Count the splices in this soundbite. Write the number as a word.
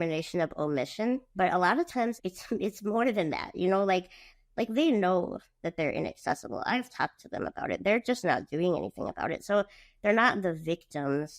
three